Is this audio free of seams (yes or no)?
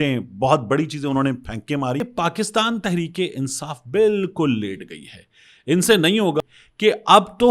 no